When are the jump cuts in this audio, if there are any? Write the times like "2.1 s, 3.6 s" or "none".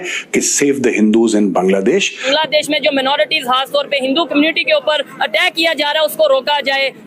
2.2 s